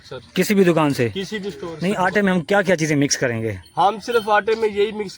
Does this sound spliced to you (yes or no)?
yes